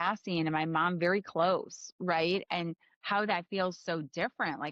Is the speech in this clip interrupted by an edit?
no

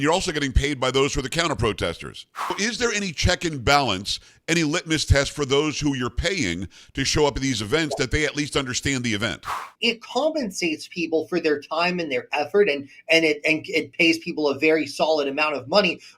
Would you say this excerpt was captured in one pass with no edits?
no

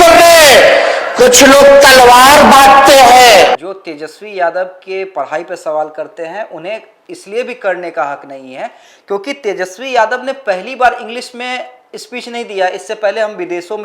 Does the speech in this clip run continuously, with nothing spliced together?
yes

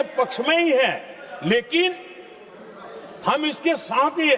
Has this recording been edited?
no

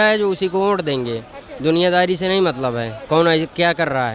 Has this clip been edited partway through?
no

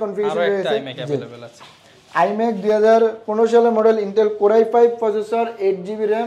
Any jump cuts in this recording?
no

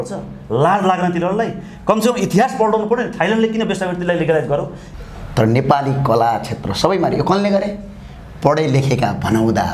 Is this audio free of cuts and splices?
no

